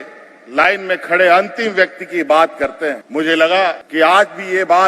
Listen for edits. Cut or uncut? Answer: cut